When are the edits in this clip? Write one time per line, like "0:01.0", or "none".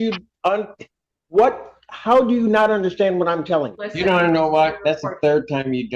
0:03.8